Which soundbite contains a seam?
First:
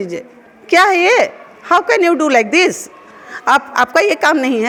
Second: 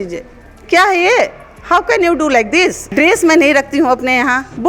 second; 1 cut; at 2.8 s

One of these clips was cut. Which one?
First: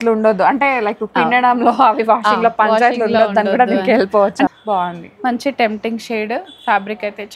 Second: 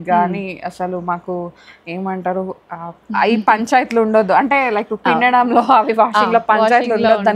first; 1 cut; at 4.5 s

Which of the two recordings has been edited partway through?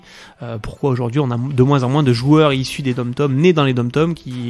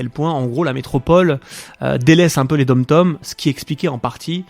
second; 1 cut; at 3.2 s

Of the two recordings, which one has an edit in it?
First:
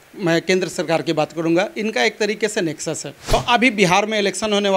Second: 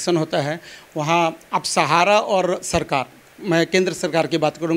first; 1 cut; at 3.1 s

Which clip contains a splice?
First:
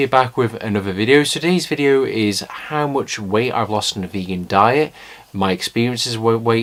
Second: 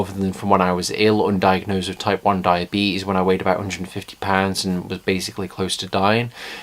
second; 1 cut; at 3.3 s

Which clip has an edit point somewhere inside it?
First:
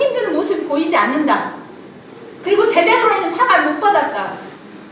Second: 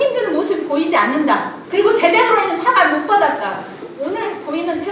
second; 2 cuts; at 1.6 s, 3.9 s

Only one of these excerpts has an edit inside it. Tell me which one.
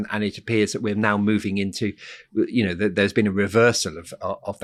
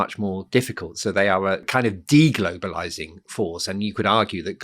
second; 1 cut; at 1.7 s

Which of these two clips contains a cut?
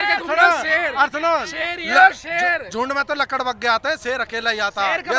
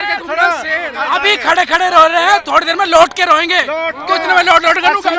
second; 1 cut; at 1.0 s

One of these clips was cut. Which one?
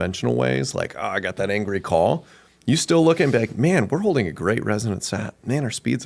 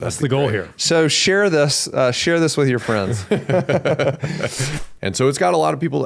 second; 1 cut; at 4.7 s

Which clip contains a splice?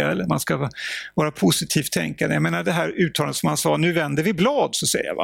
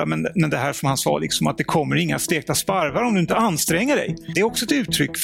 second; 1 cut; at 4.2 s

